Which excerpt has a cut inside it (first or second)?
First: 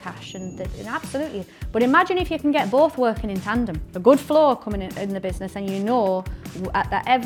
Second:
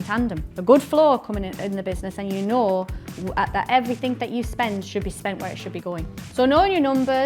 second